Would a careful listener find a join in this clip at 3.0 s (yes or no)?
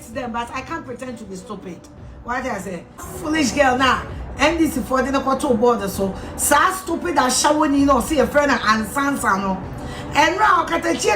yes